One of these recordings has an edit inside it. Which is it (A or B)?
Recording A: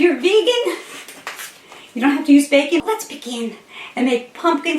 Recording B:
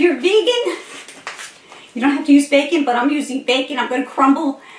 A